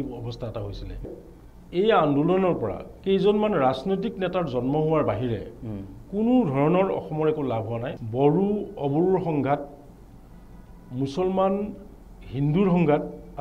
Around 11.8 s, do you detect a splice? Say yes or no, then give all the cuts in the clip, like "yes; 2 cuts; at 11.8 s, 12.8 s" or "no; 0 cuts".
no; 2 cuts; at 1.1 s, 7.9 s